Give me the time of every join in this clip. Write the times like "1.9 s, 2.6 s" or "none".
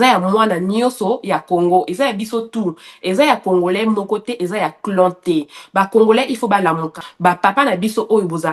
7.0 s